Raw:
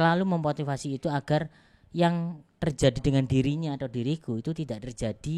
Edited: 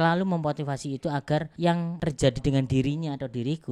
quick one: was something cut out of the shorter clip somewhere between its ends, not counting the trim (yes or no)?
yes